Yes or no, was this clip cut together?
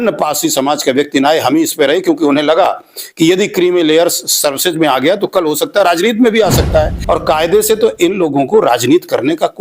yes